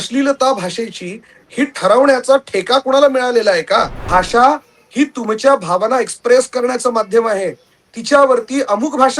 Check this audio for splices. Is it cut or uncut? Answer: cut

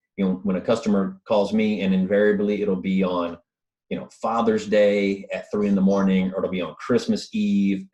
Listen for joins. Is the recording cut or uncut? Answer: uncut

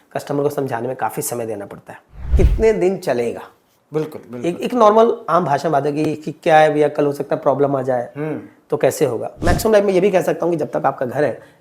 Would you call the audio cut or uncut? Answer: cut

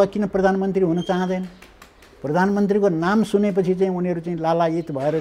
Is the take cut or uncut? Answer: uncut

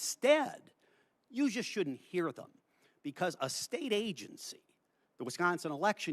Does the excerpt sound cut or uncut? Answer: uncut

